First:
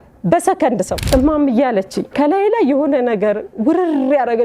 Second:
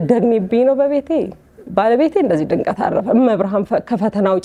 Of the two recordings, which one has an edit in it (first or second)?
first